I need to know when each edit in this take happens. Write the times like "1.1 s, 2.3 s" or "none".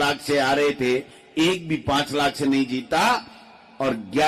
none